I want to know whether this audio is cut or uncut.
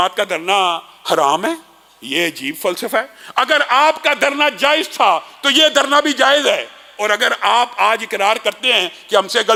uncut